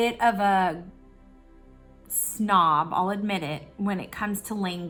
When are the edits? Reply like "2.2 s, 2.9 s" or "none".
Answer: none